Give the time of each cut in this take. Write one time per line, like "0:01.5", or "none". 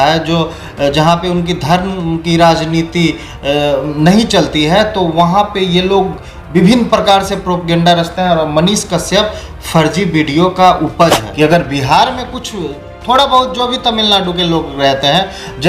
0:11.2